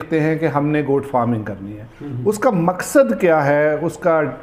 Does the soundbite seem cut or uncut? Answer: uncut